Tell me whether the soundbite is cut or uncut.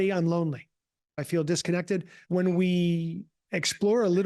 cut